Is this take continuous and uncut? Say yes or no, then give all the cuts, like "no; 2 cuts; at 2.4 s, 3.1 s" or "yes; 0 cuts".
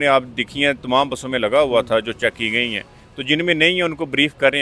yes; 0 cuts